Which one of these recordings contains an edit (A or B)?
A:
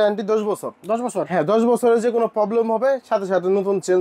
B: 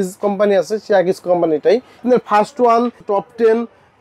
B